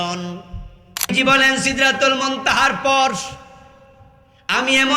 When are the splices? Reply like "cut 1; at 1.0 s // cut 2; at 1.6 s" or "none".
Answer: cut 1; at 1.1 s